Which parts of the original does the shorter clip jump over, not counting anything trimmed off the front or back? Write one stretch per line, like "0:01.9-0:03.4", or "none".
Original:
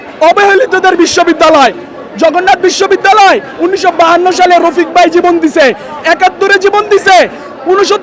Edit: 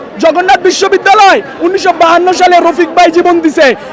none